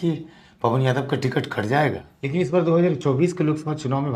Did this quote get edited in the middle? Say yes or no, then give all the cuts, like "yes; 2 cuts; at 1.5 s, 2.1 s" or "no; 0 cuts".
yes; 1 cut; at 2.1 s